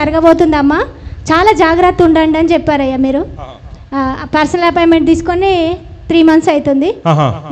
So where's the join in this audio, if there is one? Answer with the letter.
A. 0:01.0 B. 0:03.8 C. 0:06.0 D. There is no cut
D